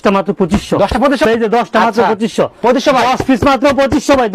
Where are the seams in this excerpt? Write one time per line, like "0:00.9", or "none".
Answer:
0:01.2